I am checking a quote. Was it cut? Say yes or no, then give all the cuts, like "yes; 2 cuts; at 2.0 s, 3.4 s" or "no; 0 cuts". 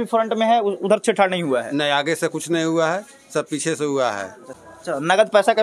yes; 1 cut; at 4.5 s